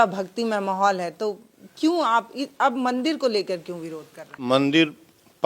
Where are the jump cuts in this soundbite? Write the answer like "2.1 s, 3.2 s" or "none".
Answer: 4.4 s